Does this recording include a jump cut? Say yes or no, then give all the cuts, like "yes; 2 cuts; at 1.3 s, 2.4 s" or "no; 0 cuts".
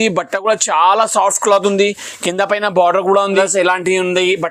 yes; 1 cut; at 3.3 s